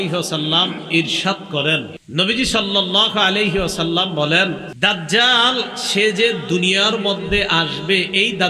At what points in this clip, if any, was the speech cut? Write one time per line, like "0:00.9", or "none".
0:02.0
0:04.7